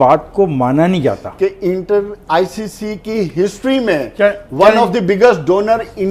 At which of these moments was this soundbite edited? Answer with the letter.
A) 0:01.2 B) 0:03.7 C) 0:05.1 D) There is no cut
D